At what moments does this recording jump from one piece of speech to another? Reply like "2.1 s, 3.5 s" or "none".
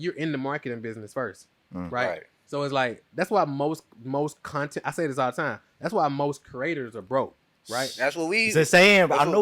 none